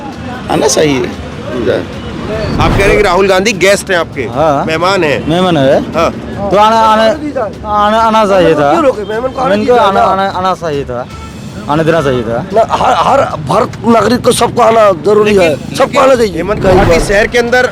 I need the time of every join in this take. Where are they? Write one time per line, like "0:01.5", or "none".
0:02.5
0:16.6